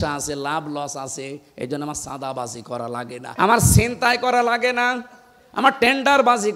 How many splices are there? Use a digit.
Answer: 1